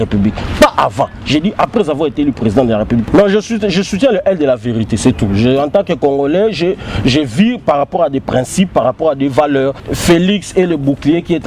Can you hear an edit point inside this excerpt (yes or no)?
yes